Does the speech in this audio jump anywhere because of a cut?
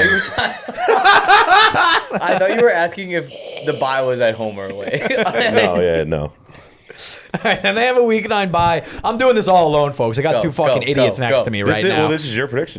no; 0 cuts

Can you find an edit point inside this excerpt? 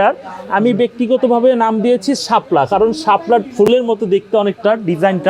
no; 0 cuts

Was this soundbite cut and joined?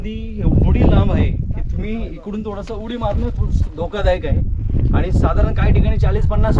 no; 0 cuts

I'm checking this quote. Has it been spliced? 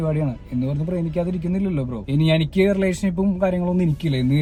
no; 0 cuts

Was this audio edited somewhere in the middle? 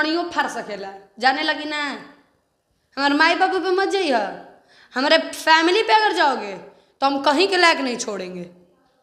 no; 0 cuts

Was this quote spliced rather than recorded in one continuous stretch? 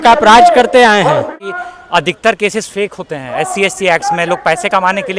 yes; 1 cut; at 1.4 s

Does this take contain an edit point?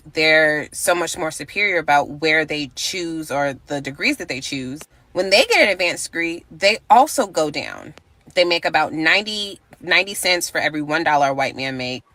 no; 0 cuts

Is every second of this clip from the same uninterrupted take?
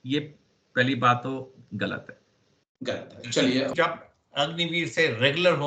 no; 1 cut; at 3.7 s

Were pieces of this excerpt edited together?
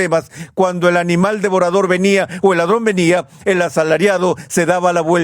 yes; 1 cut; at 1.2 s

